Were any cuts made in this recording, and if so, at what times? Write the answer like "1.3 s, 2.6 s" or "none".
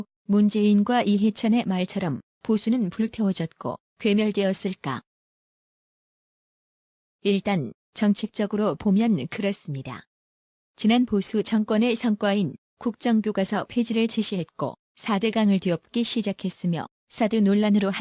none